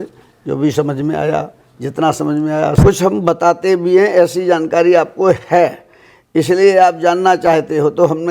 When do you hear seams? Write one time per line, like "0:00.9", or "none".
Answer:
0:02.8